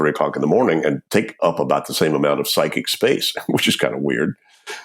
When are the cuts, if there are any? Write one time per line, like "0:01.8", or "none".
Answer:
0:01.1